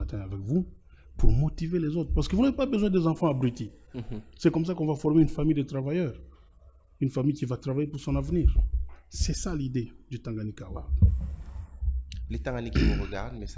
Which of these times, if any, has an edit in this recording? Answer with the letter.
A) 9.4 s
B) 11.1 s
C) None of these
C